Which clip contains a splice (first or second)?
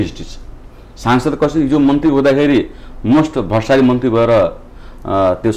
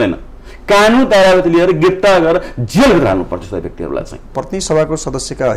second